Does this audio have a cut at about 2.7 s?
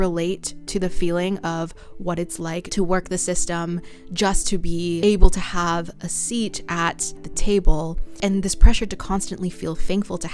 yes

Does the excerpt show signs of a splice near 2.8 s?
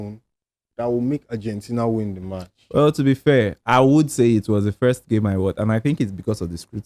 no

